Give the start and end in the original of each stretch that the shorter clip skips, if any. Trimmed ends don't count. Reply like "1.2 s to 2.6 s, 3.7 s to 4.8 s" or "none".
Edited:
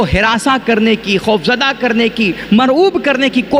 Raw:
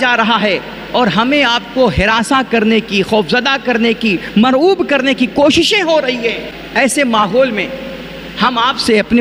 none